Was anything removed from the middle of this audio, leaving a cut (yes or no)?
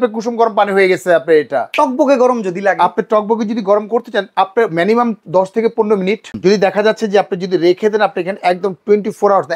yes